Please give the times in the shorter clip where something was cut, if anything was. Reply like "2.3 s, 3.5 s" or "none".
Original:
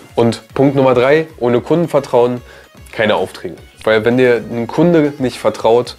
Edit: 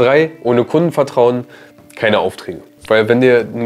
none